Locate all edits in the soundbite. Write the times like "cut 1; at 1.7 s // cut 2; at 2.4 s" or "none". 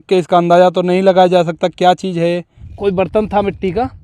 cut 1; at 2.6 s